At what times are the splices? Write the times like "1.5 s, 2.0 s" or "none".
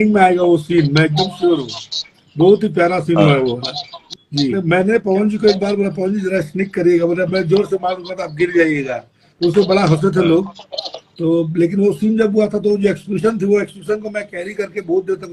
4.5 s